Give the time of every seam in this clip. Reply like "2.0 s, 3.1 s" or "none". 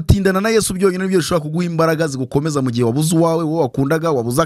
none